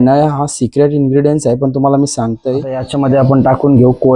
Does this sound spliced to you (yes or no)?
yes